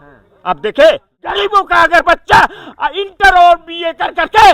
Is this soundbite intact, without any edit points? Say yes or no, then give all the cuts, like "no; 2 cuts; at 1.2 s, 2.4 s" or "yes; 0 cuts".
no; 1 cut; at 1.2 s